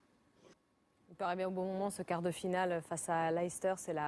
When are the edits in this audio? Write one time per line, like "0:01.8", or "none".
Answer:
0:01.8